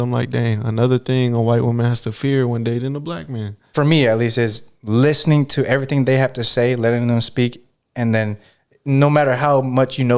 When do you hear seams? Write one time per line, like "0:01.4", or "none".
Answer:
0:03.5